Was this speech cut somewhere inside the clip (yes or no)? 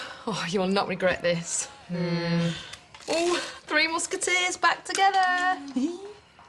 no